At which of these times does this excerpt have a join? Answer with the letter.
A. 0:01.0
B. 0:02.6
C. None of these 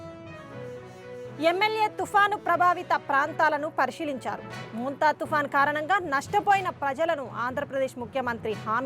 A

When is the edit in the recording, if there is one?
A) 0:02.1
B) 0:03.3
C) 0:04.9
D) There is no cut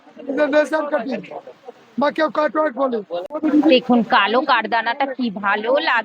B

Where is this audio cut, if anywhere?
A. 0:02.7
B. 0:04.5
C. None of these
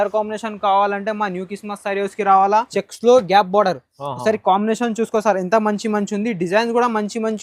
A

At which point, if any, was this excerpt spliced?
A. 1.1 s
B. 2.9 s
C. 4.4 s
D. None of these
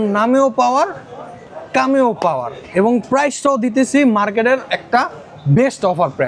D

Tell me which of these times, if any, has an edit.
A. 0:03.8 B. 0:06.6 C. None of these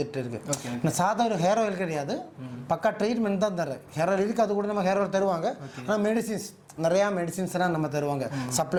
C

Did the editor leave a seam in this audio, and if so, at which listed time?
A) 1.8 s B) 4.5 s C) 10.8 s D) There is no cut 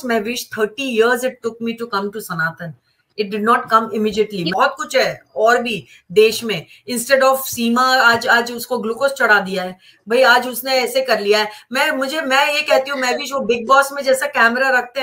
B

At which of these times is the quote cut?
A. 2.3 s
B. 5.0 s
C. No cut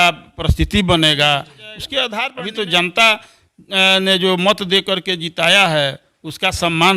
A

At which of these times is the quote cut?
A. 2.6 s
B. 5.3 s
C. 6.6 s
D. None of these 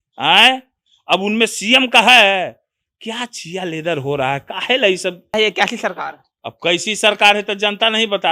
B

